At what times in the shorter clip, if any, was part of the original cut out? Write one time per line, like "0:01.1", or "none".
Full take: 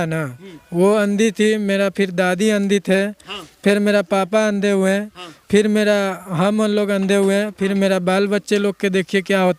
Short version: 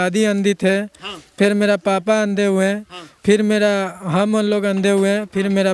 none

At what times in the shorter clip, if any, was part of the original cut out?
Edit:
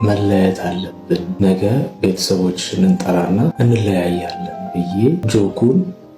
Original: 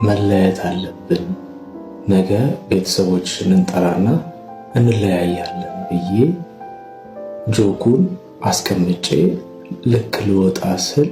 0:01.3
0:03.5
0:05.2

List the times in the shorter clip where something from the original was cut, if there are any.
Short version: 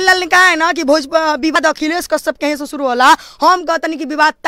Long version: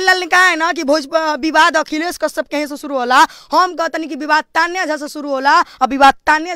0:01.6

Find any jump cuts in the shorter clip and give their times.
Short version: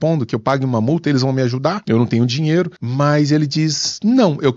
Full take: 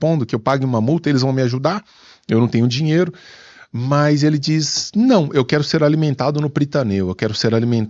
0:01.8
0:02.8

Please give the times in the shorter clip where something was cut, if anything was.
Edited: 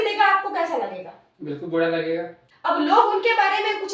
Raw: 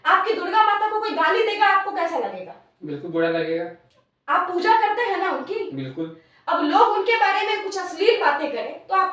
0:02.4

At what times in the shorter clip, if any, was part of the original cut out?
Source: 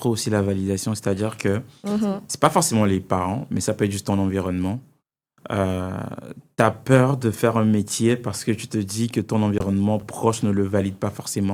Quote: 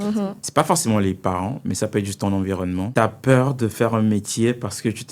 0:02.9

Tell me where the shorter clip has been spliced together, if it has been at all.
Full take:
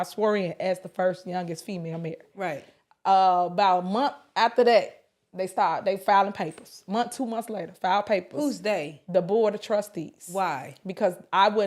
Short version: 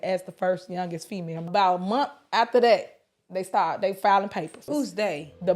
0:01.5
0:04.6

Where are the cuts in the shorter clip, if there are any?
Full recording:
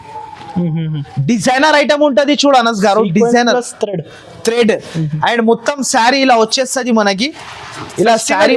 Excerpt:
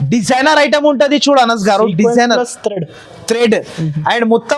none

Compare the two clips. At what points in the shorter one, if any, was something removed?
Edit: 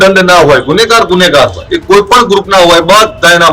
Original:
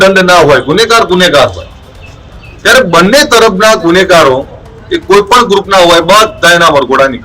0:01.7

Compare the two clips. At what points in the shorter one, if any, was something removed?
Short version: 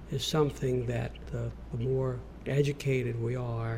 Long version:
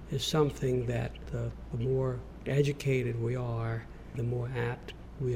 none

